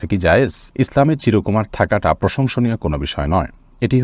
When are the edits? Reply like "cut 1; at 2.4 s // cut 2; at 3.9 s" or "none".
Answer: none

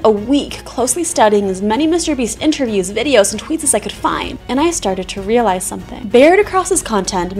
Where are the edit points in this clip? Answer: cut 1; at 4.3 s

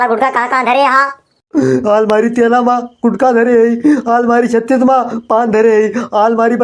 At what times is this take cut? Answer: none

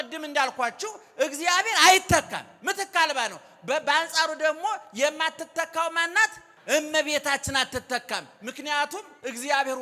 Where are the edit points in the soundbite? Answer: cut 1; at 6.5 s

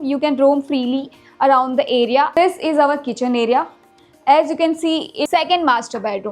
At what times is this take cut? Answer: cut 1; at 2.3 s // cut 2; at 5.3 s

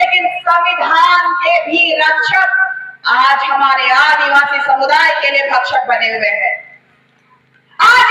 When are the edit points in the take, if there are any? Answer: none

